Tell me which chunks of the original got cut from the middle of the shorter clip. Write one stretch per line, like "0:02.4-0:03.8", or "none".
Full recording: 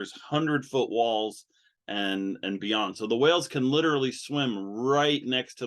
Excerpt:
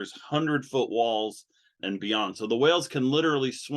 0:01.8-0:02.4